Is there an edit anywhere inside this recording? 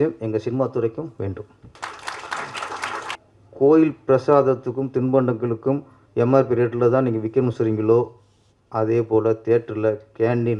yes; 2 cuts; at 1.6 s, 3.1 s

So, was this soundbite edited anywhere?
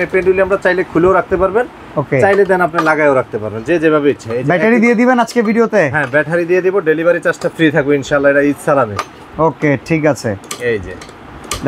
no; 0 cuts

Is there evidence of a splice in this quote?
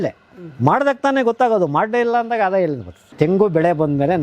yes; 1 cut; at 3.1 s

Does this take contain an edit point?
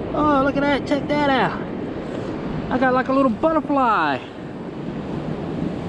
no; 0 cuts

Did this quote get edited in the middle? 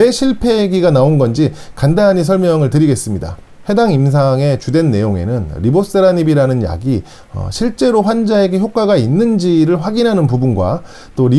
no; 0 cuts

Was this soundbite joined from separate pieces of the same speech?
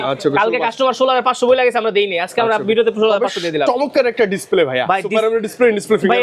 no; 0 cuts

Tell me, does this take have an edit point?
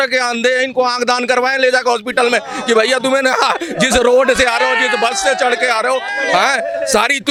no; 0 cuts

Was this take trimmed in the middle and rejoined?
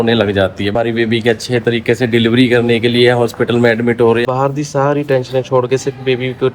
yes; 2 cuts; at 0.7 s, 4.2 s

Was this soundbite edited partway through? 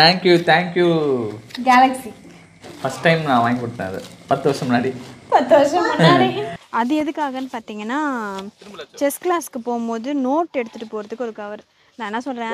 yes; 1 cut; at 6.6 s

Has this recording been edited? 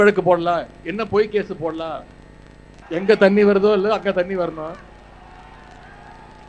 no; 0 cuts

